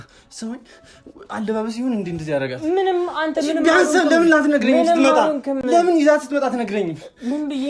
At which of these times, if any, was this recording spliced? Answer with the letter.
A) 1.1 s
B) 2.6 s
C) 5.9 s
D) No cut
D